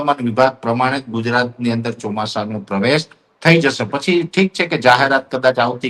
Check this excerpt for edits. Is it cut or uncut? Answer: uncut